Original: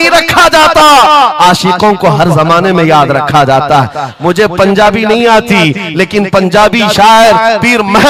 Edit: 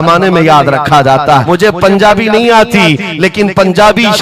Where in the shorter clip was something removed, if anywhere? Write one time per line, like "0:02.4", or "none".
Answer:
0:01.4